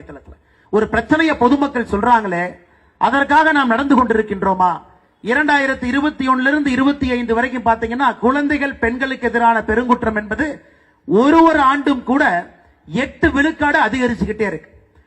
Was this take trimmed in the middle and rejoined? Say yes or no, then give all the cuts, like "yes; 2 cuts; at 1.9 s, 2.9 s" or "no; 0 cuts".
yes; 1 cut; at 2.3 s